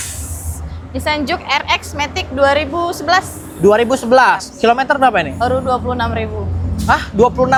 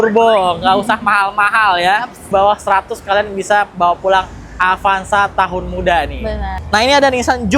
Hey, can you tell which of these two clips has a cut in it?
second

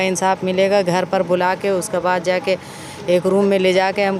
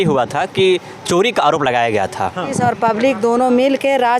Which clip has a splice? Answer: second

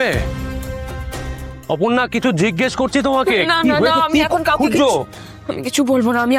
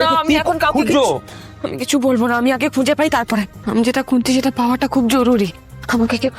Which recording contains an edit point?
second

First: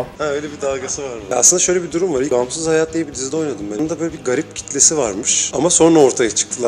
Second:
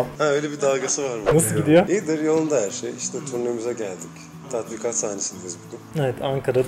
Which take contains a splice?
first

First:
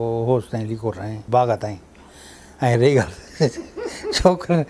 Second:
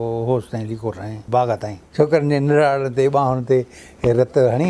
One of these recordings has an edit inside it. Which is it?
second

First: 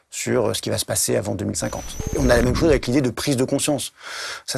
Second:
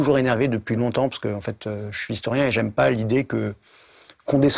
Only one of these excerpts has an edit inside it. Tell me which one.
first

